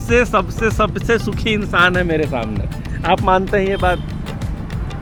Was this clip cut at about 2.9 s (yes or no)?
no